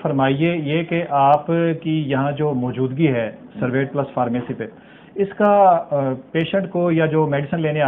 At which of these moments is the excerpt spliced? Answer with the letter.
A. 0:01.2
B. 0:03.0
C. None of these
C